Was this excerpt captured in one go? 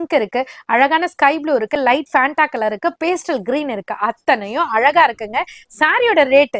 yes; 0 cuts

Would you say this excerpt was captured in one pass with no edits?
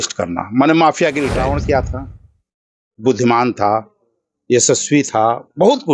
no; 1 cut; at 1.3 s

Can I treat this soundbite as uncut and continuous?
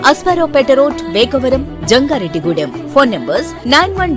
yes; 0 cuts

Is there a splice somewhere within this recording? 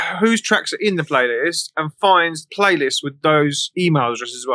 yes; 2 cuts; at 2.4 s, 3.6 s

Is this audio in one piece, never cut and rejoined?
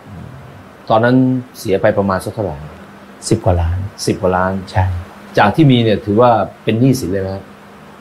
yes; 0 cuts

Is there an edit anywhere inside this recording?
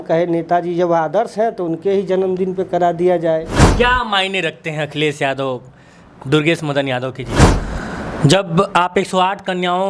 yes; 2 cuts; at 3.6 s, 7.6 s

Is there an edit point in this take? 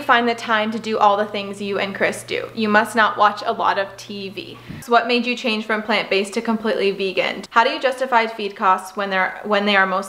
yes; 2 cuts; at 4.8 s, 7.4 s

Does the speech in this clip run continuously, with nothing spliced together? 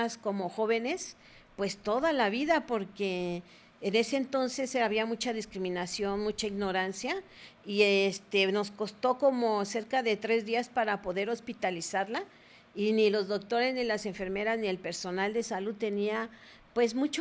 yes; 0 cuts

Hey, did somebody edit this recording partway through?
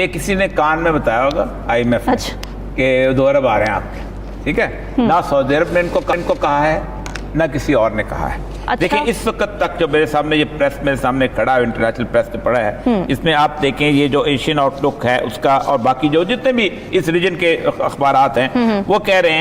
no; 0 cuts

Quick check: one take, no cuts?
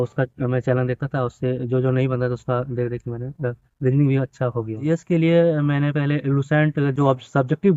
no; 1 cut; at 4.8 s

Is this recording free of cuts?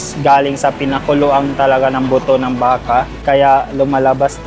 no; 1 cut; at 3.1 s

